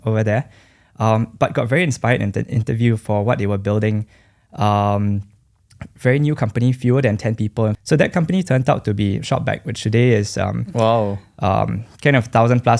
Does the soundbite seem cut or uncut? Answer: cut